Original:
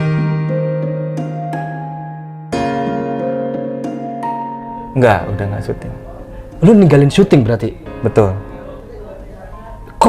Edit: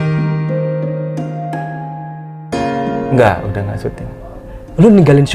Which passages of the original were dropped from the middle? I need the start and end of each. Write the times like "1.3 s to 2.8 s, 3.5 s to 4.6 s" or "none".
3.1 s to 4.9 s